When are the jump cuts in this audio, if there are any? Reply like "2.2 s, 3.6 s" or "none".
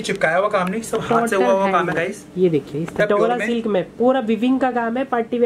2.9 s